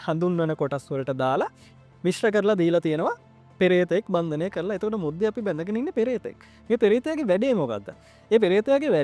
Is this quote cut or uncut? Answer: uncut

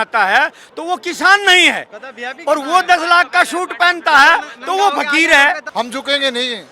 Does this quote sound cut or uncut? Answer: cut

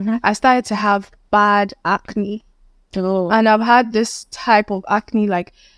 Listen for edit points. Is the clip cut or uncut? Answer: uncut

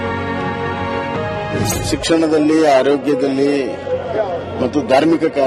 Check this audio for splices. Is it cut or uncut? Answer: uncut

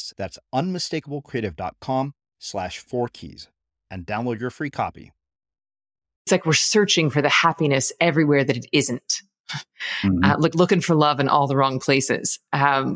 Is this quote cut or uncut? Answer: cut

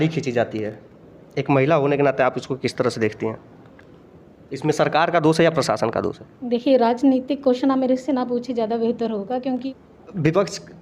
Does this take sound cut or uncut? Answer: cut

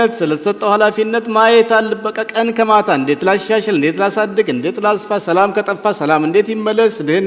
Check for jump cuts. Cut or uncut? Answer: uncut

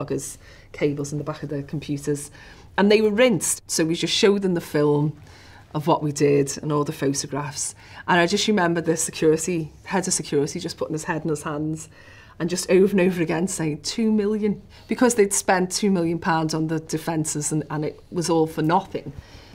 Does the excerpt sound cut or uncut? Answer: cut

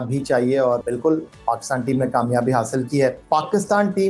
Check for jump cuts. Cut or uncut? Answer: cut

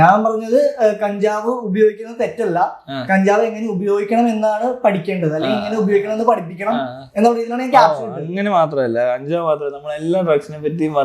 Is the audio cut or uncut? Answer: uncut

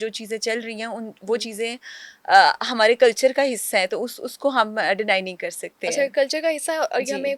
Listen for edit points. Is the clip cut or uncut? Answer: uncut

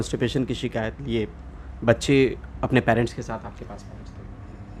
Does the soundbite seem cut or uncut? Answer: uncut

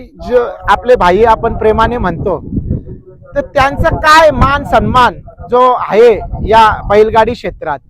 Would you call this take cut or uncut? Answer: uncut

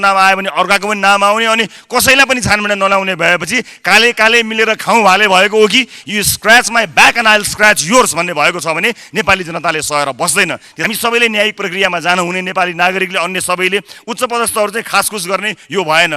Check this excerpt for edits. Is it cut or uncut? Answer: cut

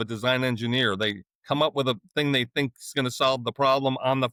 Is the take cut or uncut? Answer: uncut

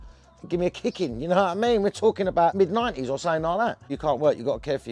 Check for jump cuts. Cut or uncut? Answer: cut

